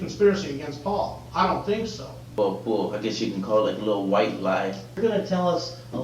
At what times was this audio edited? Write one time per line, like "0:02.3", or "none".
0:02.3
0:05.0